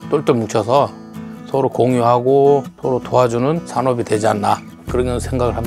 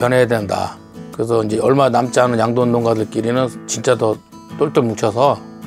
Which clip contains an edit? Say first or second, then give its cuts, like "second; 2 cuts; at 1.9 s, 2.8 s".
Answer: first; 2 cuts; at 2.7 s, 3.6 s